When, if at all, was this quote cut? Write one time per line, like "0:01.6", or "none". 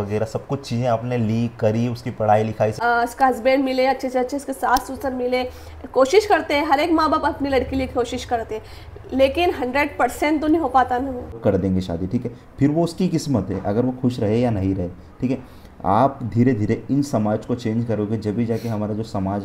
0:02.8
0:11.4